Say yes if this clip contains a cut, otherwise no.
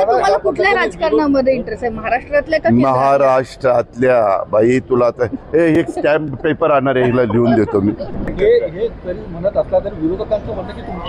yes